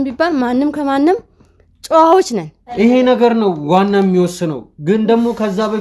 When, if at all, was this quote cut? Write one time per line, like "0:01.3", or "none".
0:02.6